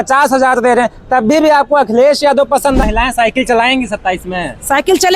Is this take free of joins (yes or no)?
no